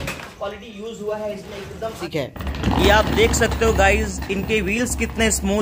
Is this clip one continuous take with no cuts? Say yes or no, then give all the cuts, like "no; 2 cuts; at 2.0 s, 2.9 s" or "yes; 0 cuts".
no; 1 cut; at 2.0 s